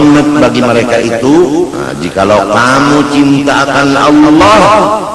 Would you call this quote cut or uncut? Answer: uncut